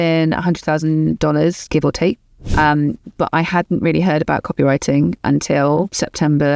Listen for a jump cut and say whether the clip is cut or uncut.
cut